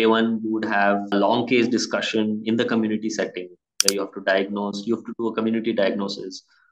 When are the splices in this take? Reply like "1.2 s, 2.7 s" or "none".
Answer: 1.1 s